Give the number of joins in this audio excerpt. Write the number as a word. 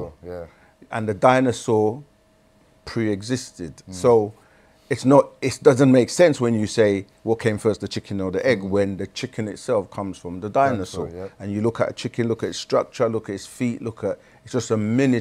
zero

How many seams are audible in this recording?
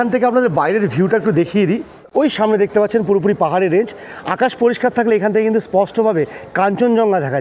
one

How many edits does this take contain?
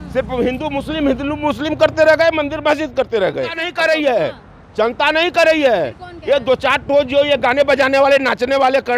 one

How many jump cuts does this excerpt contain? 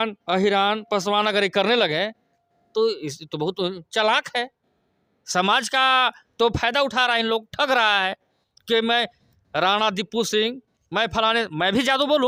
zero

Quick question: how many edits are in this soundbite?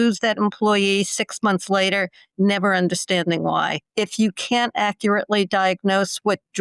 one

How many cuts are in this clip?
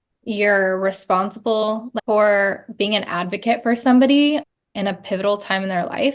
two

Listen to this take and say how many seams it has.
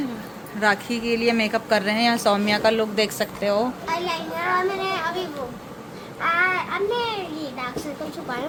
zero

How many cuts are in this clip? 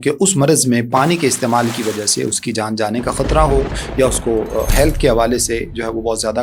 zero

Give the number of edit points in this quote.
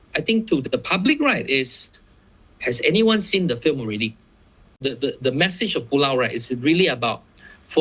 one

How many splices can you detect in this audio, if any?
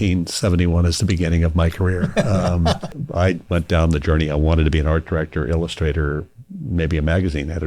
one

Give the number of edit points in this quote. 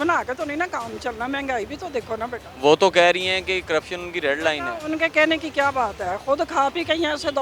zero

